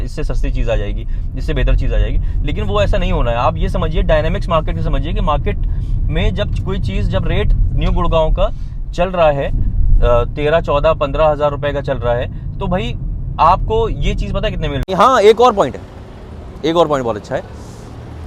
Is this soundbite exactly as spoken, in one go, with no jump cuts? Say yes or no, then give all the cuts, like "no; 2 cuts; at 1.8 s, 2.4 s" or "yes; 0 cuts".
no; 1 cut; at 14.9 s